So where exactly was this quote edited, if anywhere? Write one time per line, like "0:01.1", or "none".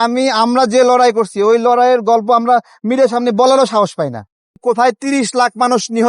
0:04.6

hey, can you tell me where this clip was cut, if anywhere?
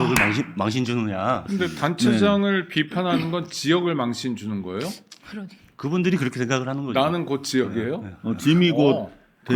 0:01.4

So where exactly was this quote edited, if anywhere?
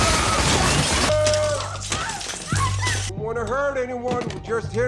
0:01.1

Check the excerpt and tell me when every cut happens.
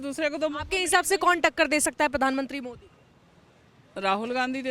none

